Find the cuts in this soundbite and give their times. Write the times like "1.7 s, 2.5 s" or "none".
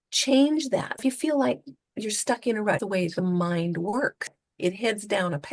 1.0 s, 2.8 s, 4.4 s